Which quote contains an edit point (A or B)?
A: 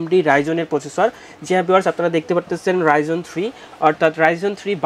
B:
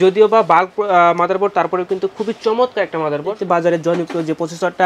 B